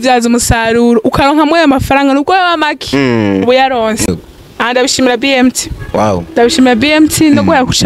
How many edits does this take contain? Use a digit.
1